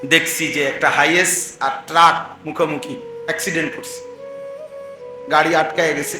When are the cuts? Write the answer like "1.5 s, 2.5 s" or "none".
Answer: 3.7 s, 5.3 s